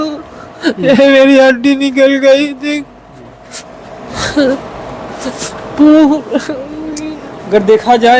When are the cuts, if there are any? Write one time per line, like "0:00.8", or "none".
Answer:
none